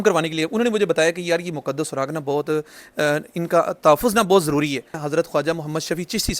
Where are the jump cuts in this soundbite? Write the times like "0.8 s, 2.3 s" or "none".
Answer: 5.0 s